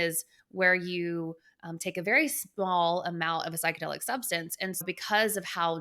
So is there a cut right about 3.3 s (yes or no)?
no